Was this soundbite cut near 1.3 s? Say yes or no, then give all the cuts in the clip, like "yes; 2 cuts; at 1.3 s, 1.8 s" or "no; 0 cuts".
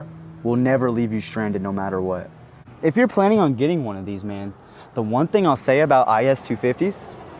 no; 1 cut; at 2.7 s